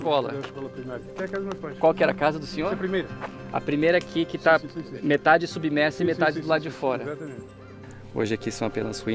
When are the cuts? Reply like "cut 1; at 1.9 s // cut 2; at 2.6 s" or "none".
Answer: cut 1; at 1.0 s // cut 2; at 7.6 s